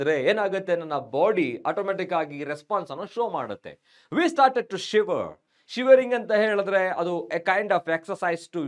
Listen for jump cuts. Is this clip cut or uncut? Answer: uncut